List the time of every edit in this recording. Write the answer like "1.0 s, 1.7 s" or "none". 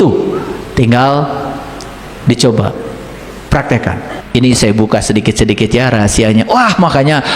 4.2 s